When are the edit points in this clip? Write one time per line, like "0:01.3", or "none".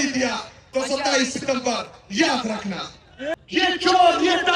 0:03.3